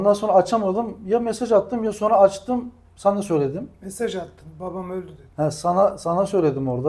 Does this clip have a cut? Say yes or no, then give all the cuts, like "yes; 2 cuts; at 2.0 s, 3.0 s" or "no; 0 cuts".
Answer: no; 0 cuts